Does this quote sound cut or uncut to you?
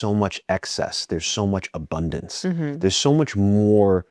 uncut